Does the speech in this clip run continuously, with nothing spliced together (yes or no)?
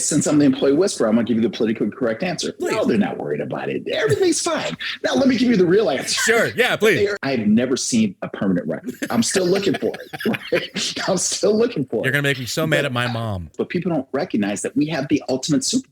no